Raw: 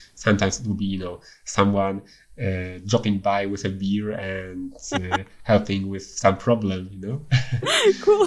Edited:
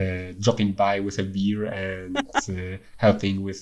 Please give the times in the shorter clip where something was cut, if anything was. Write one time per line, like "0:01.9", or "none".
none